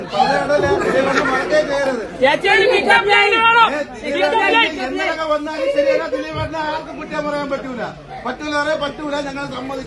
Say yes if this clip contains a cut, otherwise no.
no